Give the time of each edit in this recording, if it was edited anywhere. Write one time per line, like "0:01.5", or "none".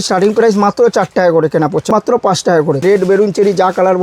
0:01.9
0:02.8